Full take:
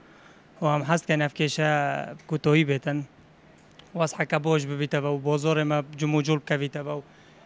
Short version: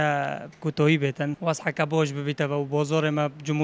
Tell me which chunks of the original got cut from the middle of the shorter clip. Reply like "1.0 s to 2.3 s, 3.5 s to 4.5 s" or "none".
3.0 s to 3.9 s